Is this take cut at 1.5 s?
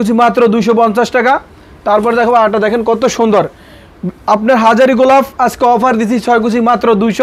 no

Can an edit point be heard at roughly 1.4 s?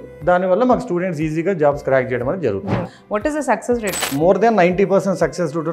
no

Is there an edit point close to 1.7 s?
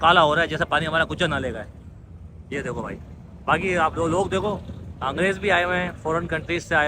no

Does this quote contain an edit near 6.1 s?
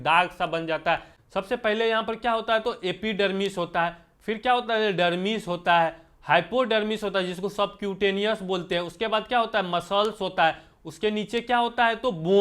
no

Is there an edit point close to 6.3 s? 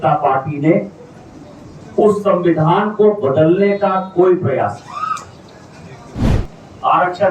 yes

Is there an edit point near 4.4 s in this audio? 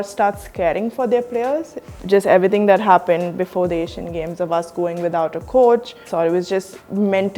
no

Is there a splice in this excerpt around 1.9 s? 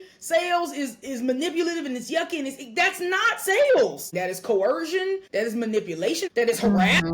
no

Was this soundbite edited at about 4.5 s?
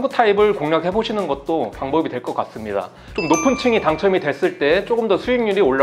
no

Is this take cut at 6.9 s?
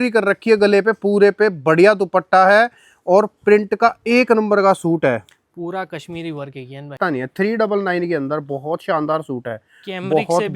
yes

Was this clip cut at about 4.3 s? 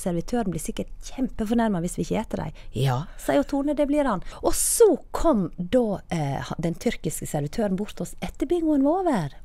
yes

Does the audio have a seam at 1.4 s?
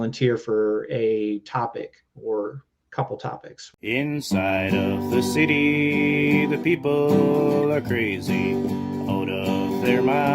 no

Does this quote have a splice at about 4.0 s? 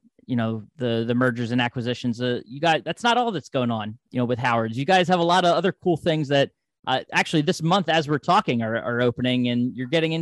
yes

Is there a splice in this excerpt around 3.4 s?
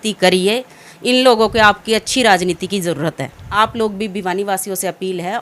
yes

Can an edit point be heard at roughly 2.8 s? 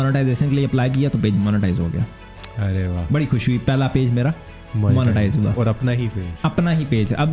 no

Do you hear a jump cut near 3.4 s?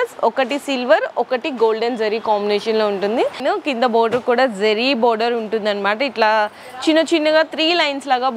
yes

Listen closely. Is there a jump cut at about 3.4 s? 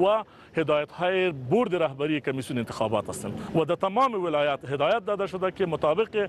yes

